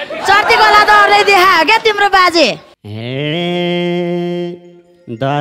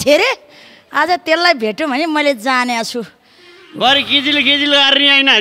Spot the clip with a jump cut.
first; 1 cut; at 2.7 s

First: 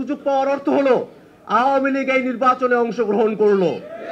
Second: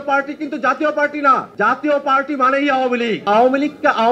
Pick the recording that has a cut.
second; 2 cuts; at 1.5 s, 3.3 s

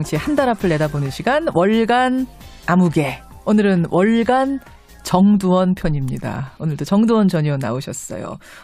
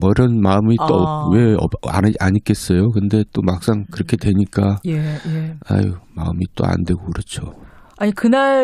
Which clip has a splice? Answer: second; 1 cut; at 1.0 s

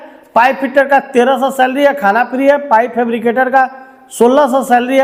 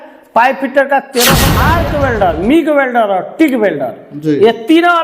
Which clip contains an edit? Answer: second; 1 cut; at 1.4 s

